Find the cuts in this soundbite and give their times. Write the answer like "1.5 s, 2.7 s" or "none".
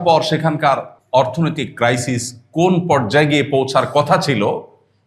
0.9 s